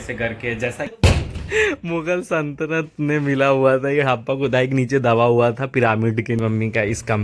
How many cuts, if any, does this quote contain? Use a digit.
2